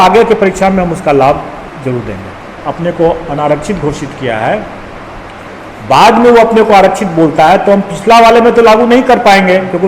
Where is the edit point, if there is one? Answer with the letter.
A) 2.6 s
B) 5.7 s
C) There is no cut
A